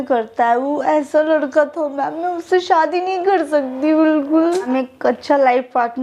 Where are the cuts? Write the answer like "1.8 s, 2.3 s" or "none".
4.7 s